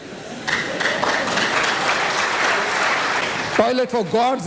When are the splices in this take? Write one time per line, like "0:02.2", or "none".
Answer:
0:03.2